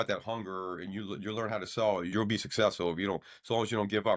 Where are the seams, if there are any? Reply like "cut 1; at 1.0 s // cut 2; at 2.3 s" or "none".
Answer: cut 1; at 2.1 s